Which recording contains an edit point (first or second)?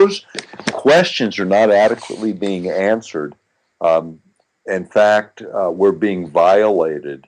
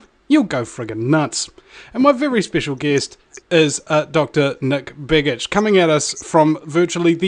first